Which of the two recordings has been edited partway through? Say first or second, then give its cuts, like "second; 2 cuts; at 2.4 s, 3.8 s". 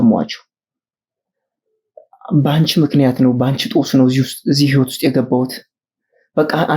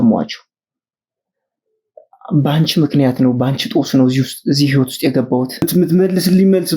second; 1 cut; at 5.6 s